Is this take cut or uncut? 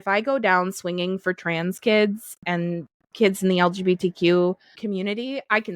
cut